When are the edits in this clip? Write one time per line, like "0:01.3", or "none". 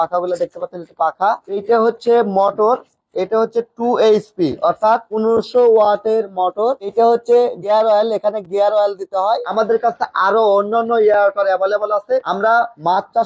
0:09.5